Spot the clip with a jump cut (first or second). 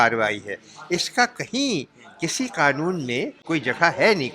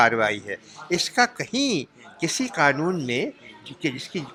first